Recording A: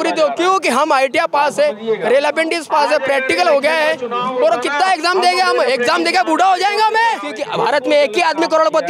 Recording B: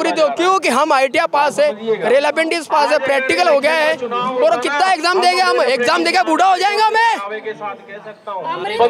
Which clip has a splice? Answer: A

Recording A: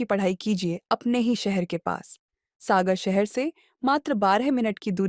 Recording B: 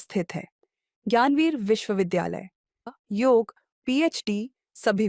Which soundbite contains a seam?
B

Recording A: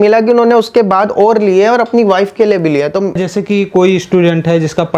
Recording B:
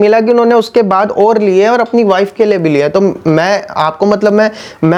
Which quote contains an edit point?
A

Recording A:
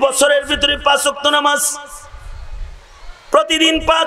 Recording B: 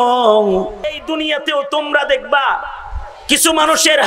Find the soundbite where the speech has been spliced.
B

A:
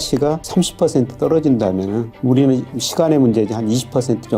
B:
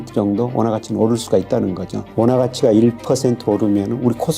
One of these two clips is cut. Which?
B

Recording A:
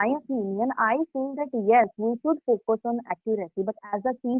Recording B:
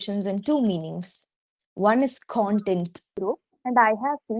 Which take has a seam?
B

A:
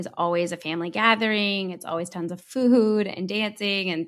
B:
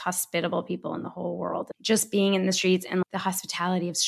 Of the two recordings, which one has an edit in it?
B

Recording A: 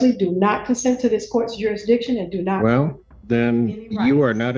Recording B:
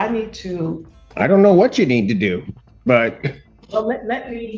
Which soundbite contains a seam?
B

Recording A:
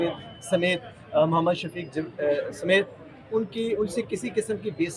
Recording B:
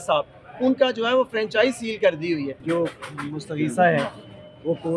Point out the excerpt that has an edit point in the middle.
B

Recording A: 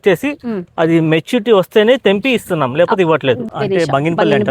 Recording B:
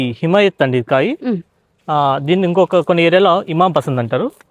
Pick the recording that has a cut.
A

